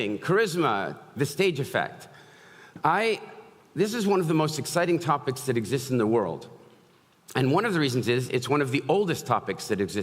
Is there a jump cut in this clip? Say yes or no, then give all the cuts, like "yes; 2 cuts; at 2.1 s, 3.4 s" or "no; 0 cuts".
no; 0 cuts